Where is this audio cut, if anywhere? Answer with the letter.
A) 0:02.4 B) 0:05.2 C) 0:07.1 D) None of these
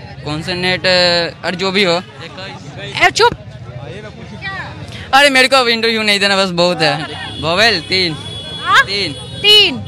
C